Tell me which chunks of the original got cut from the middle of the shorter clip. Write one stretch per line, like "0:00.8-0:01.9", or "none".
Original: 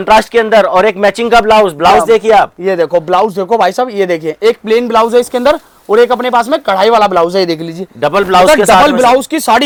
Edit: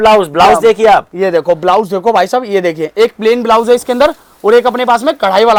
none